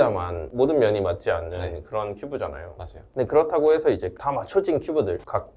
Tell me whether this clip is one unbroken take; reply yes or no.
yes